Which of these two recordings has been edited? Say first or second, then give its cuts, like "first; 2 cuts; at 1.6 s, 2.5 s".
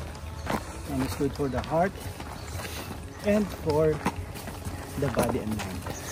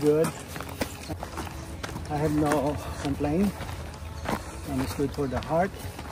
second; 1 cut; at 1.1 s